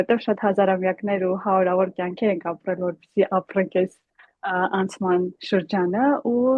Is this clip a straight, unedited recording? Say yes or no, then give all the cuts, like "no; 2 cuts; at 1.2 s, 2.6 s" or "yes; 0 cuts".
yes; 0 cuts